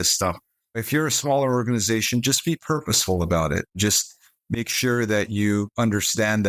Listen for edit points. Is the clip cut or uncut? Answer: uncut